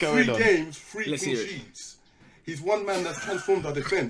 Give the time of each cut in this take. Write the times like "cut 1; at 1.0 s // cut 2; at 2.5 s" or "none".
none